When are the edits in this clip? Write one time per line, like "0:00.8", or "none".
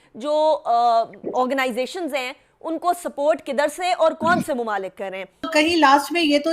0:05.5